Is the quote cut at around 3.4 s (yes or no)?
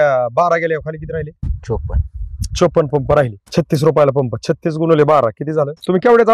yes